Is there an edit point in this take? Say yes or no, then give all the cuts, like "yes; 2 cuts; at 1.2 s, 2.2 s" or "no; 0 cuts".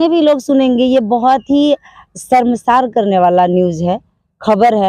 no; 0 cuts